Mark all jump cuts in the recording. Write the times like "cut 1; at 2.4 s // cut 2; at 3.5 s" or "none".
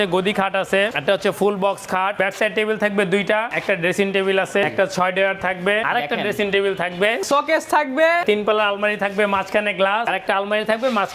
cut 1; at 0.9 s // cut 2; at 2.2 s // cut 3; at 3.5 s // cut 4; at 4.7 s // cut 5; at 5.8 s // cut 6; at 7.2 s // cut 7; at 8.2 s // cut 8; at 10.1 s